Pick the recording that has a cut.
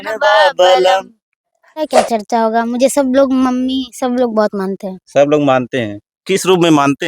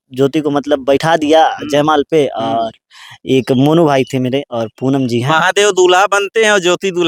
first; 1 cut; at 1.8 s

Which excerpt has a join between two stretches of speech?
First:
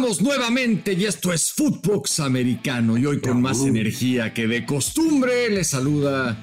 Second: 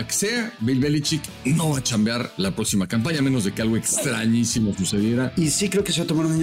second; 3 cuts; at 1.3 s, 2.3 s, 5.3 s

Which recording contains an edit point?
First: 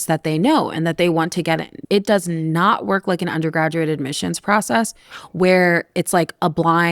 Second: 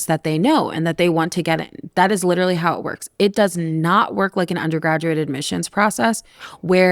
first; 1 cut; at 1.7 s

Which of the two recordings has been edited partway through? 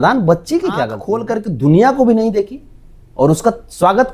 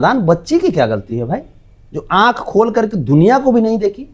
first; 1 cut; at 1.0 s

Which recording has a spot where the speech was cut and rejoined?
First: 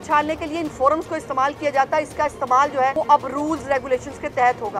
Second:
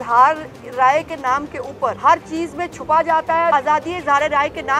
second; 2 cuts; at 2.0 s, 3.5 s

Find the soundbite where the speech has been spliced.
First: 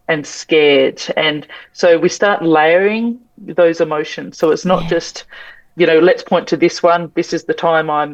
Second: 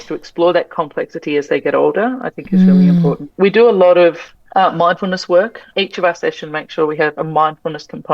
second; 2 cuts; at 3.3 s, 5.7 s

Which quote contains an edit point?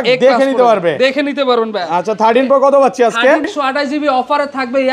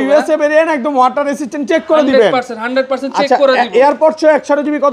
first; 1 cut; at 3.5 s

